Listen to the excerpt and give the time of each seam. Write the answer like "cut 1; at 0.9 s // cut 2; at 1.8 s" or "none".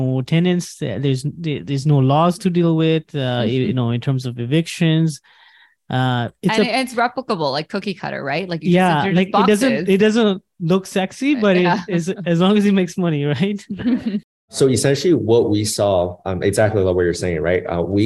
cut 1; at 14.5 s